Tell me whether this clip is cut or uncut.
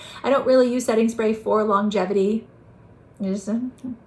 uncut